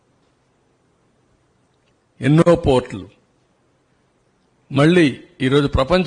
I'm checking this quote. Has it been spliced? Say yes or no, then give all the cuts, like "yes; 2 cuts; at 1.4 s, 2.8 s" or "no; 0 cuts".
yes; 1 cut; at 2.5 s